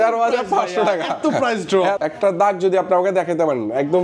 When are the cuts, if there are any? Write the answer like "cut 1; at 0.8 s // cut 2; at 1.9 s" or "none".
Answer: cut 1; at 2.0 s